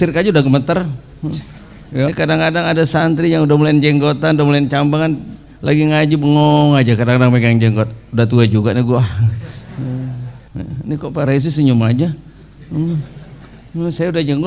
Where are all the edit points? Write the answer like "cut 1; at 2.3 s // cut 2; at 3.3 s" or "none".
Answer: cut 1; at 2.1 s // cut 2; at 10.3 s